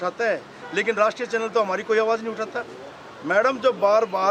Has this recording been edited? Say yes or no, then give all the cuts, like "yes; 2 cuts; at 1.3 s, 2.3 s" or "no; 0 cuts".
no; 0 cuts